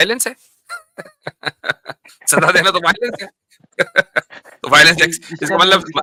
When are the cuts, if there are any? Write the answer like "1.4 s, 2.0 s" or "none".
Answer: none